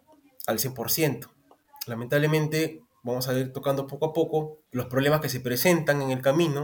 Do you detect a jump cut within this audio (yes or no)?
yes